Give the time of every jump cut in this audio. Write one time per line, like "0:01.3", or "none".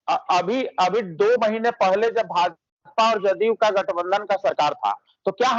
none

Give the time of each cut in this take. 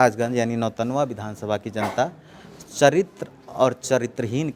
none

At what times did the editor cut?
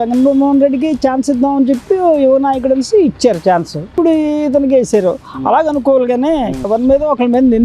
0:03.9
0:06.7

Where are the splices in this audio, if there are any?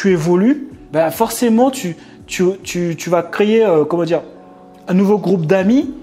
none

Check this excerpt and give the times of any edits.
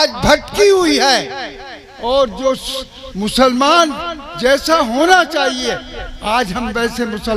none

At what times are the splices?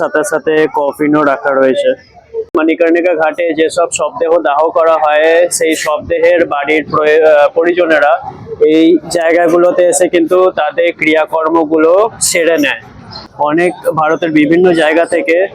0:02.5
0:13.2

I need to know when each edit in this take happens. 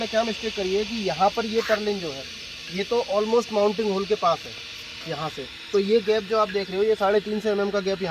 none

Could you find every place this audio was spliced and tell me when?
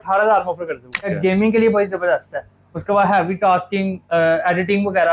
0:01.1

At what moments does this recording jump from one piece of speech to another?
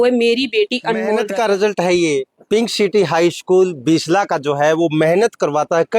0:01.2

